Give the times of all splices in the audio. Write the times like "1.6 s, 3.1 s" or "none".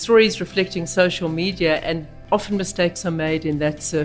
2.1 s

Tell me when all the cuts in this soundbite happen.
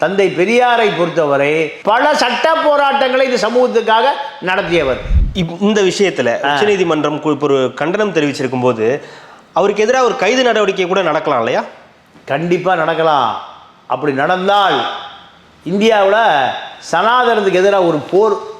5.1 s

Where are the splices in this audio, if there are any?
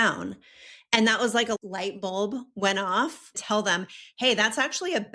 1.6 s, 3.4 s

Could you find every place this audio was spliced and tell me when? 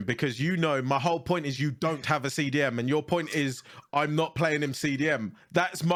none

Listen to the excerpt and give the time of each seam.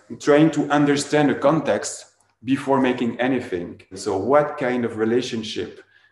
4.0 s

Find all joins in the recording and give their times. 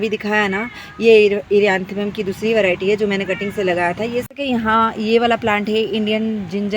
4.3 s

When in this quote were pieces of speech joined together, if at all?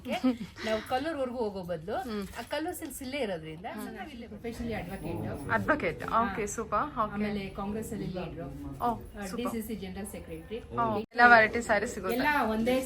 4.1 s, 11.1 s

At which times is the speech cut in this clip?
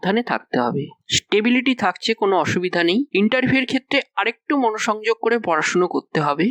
none

